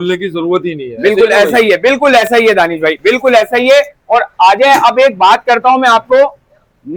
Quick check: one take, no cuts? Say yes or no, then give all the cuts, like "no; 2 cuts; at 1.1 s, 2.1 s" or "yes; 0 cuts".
yes; 0 cuts